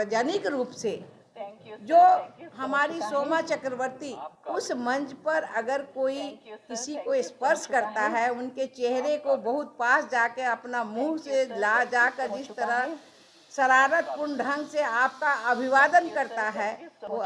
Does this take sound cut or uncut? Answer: cut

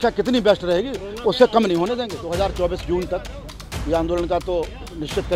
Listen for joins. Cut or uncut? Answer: cut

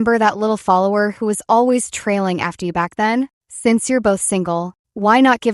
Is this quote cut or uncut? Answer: cut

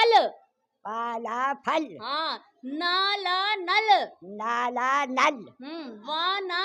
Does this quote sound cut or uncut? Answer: uncut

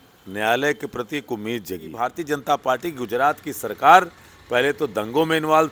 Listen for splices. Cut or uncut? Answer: cut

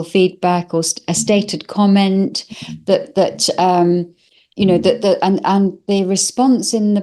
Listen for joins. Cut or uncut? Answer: uncut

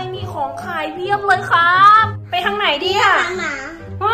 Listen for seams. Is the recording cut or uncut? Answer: cut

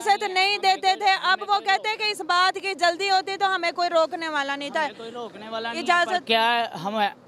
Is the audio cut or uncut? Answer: uncut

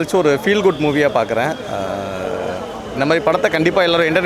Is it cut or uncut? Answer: uncut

